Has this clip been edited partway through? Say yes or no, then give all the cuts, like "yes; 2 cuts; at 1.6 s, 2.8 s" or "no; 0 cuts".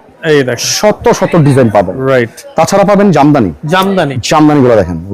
yes; 2 cuts; at 2.4 s, 4.2 s